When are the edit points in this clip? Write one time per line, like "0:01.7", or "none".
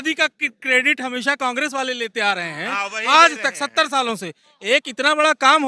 none